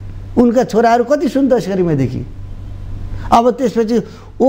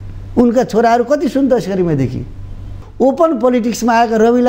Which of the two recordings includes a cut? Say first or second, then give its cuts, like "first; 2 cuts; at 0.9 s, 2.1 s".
second; 1 cut; at 2.8 s